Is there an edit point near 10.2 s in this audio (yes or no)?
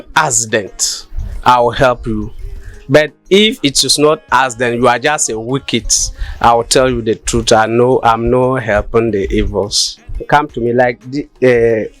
yes